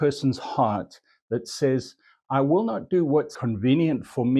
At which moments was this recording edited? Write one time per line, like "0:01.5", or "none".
0:03.3